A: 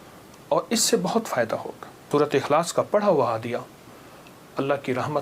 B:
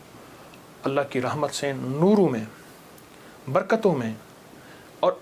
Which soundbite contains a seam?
A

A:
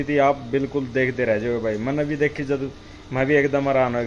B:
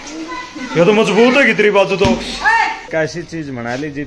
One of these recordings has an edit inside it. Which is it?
B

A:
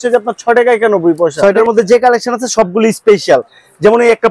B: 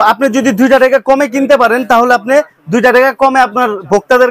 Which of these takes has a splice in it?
A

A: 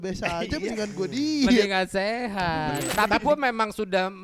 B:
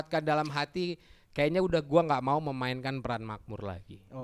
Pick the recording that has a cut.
A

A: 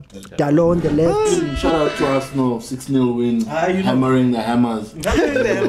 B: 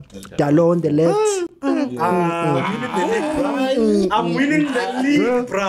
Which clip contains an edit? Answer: A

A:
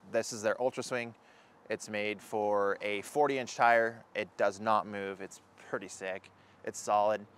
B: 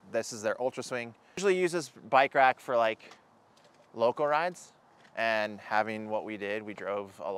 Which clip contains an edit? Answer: B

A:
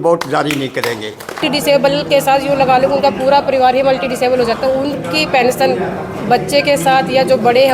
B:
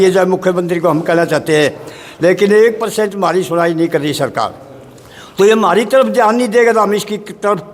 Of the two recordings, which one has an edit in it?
A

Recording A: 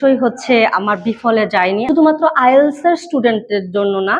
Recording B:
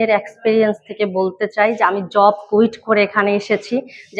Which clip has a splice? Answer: A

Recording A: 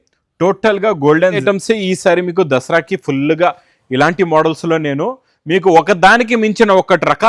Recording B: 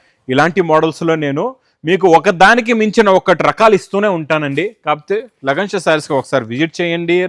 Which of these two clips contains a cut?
A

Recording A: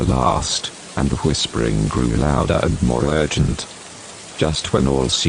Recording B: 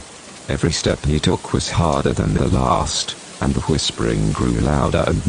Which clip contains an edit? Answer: B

